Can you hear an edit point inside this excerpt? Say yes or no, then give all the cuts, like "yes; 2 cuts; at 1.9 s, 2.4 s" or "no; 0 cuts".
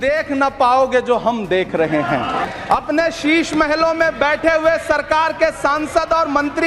yes; 1 cut; at 2.4 s